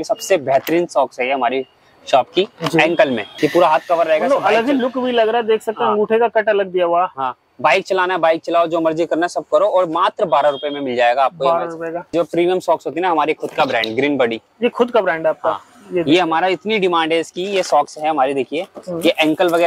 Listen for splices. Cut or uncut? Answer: cut